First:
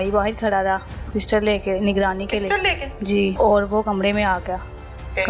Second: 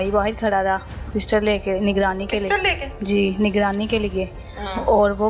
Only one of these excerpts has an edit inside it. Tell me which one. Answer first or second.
first